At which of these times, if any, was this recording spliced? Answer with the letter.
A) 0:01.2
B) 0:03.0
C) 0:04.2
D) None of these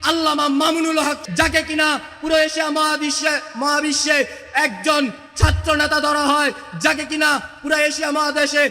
A